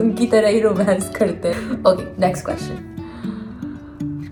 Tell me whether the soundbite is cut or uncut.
uncut